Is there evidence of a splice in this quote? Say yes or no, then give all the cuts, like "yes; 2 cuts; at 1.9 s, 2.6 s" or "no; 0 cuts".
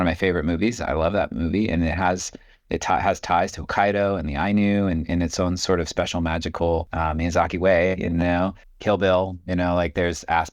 yes; 2 cuts; at 6.9 s, 8.7 s